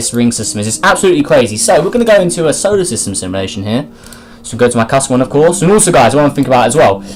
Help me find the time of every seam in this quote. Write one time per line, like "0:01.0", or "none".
none